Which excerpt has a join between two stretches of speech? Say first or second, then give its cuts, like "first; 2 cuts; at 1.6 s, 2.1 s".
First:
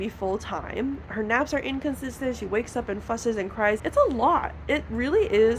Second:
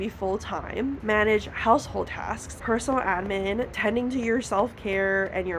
second; 3 cuts; at 1.0 s, 2.5 s, 3.7 s